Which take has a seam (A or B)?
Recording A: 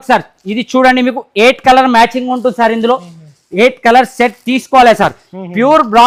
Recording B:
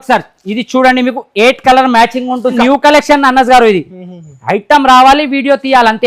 B